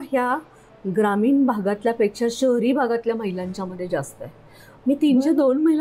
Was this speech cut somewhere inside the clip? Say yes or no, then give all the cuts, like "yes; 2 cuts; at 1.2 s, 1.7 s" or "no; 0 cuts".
no; 0 cuts